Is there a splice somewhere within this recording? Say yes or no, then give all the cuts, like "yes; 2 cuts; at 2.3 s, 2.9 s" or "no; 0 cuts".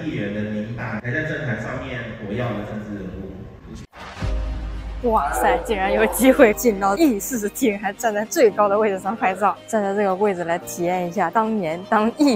yes; 3 cuts; at 3.9 s, 6.9 s, 9.6 s